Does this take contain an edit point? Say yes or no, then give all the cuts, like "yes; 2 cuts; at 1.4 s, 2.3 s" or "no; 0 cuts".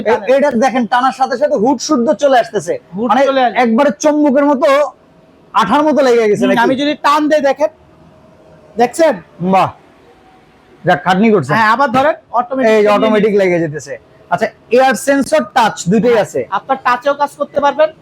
no; 0 cuts